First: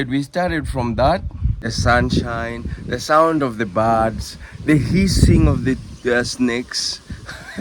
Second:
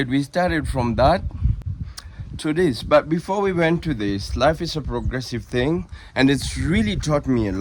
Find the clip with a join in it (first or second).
first